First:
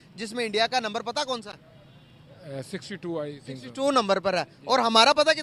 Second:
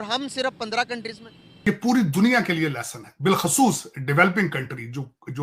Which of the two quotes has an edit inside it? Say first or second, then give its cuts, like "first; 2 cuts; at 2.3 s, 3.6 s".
second; 1 cut; at 1.7 s